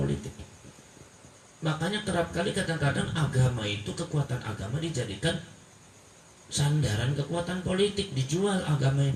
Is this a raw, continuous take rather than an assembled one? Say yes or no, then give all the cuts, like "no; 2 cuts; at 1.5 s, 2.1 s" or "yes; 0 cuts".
yes; 0 cuts